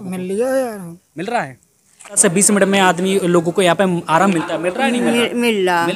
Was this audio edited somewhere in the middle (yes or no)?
yes